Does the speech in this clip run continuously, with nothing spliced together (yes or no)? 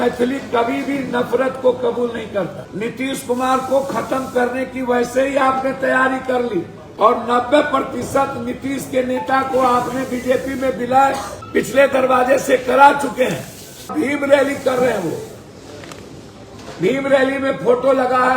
no